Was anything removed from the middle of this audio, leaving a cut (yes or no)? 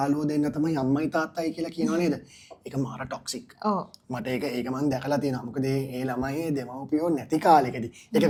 no